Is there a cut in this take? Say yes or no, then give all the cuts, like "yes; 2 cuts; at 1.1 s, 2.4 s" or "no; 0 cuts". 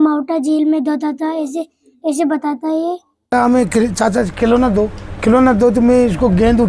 yes; 1 cut; at 3.3 s